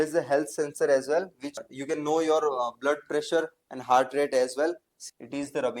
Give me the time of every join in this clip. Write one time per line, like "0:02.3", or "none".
0:01.6
0:04.9

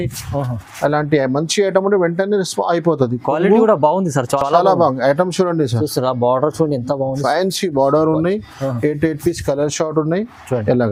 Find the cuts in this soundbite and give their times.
none

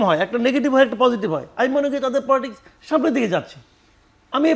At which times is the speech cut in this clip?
none

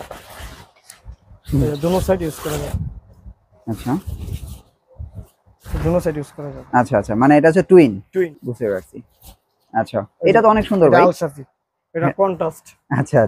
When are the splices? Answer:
0:08.4

